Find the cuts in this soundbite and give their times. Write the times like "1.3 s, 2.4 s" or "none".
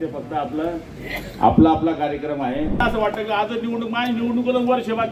2.7 s